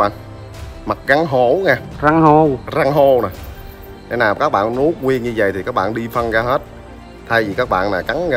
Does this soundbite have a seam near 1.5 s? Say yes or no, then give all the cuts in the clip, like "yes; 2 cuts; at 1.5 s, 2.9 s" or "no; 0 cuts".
no; 0 cuts